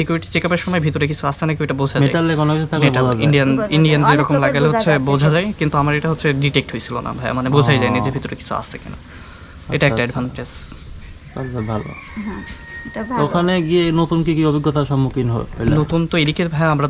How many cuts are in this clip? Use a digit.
0